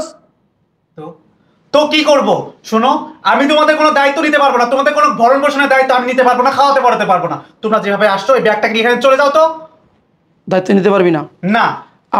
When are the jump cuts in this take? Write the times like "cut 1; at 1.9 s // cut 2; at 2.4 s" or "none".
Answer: none

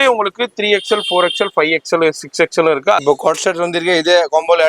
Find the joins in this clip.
cut 1; at 3.0 s

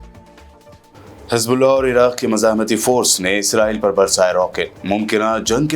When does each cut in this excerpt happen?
cut 1; at 0.9 s

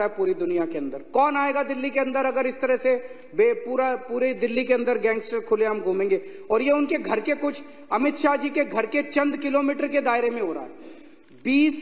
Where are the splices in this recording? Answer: none

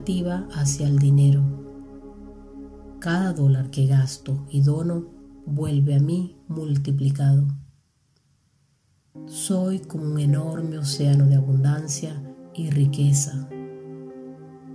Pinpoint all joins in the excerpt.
none

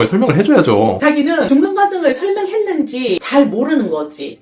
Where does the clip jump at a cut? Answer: cut 1; at 1.5 s // cut 2; at 3.2 s

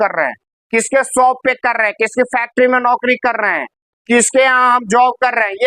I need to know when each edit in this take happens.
none

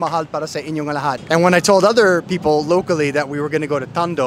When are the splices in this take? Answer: cut 1; at 1.2 s

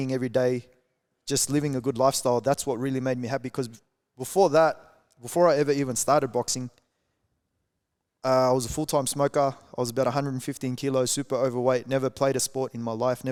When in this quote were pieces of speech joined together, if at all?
none

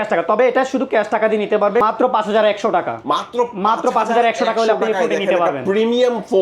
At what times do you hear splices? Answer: cut 1; at 1.8 s

